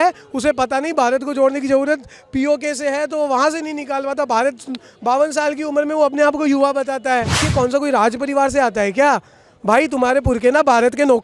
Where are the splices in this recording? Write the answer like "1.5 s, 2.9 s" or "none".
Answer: 7.4 s